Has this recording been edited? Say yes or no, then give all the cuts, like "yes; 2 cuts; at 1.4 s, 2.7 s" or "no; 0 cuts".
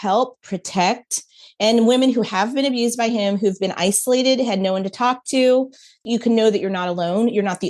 yes; 1 cut; at 6.0 s